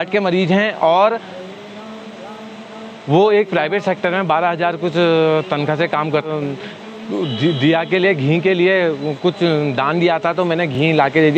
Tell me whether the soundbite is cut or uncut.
cut